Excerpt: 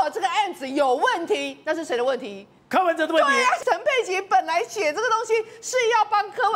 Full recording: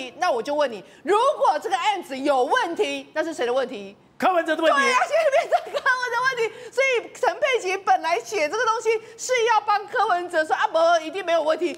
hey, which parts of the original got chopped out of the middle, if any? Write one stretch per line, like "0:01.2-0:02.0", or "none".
0:05.1-0:07.2